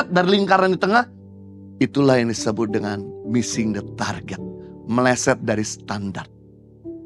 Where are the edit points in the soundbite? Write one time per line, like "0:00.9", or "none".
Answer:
none